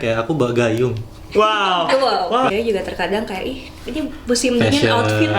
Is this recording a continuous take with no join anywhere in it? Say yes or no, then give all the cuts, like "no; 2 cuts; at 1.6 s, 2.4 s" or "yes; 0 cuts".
no; 1 cut; at 2.5 s